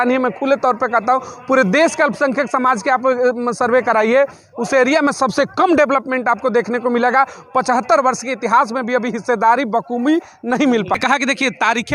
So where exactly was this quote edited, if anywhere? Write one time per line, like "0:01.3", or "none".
0:11.0